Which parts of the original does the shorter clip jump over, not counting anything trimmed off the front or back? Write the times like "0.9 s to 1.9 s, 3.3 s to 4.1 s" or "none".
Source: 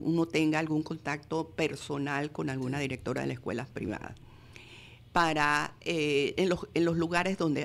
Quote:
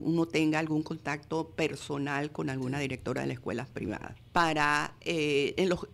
4.1 s to 4.9 s

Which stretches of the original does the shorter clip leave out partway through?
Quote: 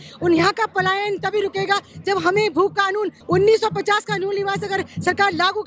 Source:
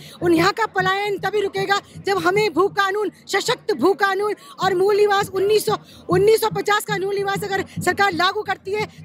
3.2 s to 6.0 s

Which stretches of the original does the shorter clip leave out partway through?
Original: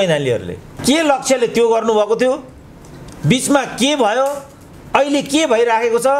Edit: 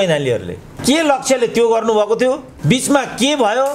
2.5 s to 3.1 s

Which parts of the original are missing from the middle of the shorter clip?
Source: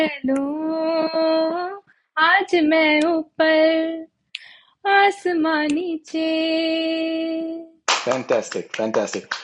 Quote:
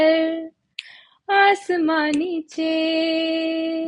none

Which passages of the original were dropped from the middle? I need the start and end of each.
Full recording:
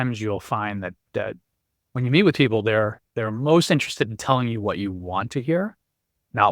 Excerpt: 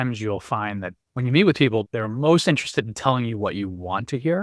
0.9 s to 1.7 s, 2.6 s to 3.1 s

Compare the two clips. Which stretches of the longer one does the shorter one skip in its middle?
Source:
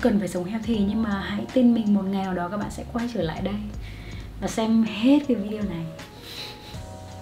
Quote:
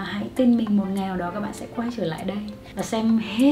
3.8 s to 4.2 s

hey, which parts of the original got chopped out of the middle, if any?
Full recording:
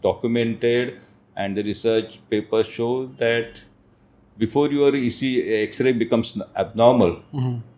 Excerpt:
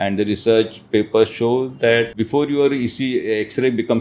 3.5 s to 4.3 s

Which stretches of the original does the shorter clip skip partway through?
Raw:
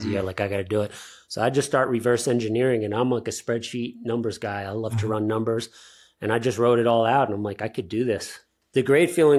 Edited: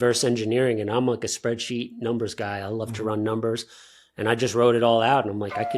none

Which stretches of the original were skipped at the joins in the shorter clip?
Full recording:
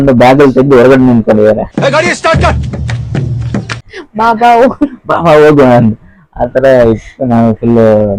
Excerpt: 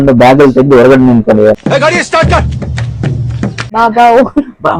1.6 s to 1.7 s, 3.7 s to 4.1 s

